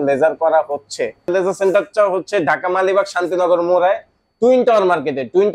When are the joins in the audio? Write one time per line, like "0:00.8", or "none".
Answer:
0:01.3